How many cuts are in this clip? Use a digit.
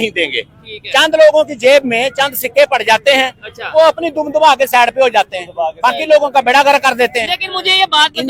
0